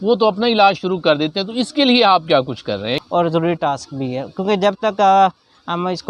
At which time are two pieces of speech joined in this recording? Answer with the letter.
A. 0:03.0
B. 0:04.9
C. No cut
A